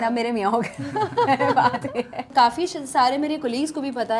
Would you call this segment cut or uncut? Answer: cut